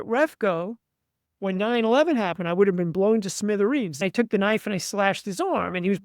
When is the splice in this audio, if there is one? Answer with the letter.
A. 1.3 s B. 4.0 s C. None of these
B